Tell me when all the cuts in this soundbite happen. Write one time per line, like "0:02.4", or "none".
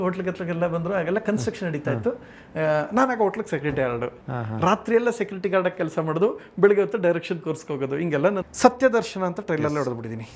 0:08.5

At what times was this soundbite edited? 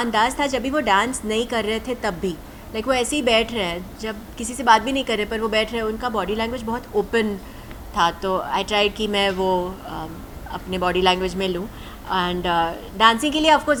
none

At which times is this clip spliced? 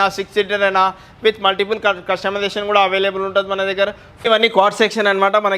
0:04.3

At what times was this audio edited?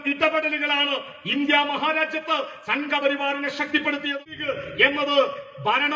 0:04.1

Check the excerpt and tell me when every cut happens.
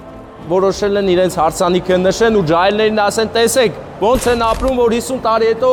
none

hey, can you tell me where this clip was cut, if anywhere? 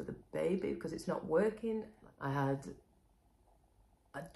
0:02.0

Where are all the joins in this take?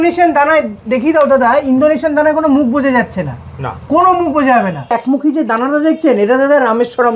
0:05.0

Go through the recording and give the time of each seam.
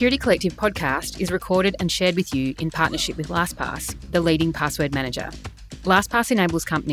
none

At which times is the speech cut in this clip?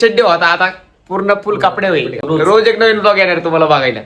0:02.2

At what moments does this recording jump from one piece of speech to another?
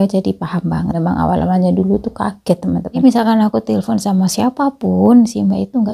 0:00.9
0:03.0

